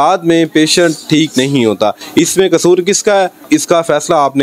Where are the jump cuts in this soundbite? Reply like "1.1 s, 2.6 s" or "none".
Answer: 3.4 s